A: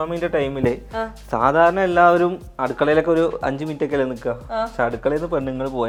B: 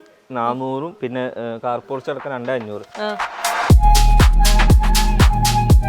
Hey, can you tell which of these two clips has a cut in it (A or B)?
B